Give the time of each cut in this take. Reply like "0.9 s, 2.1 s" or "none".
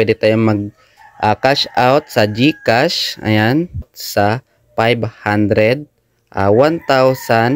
4.0 s